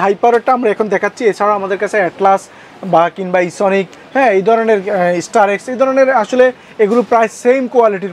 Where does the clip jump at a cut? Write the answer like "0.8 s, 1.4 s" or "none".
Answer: none